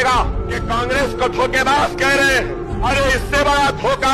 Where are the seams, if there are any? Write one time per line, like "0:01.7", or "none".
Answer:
none